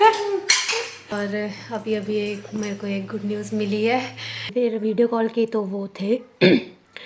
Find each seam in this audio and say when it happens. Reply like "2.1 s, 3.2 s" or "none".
1.1 s, 4.5 s